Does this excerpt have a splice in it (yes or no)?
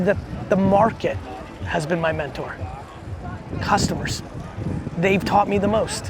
no